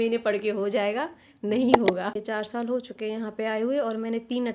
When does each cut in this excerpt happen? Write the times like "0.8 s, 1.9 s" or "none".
2.2 s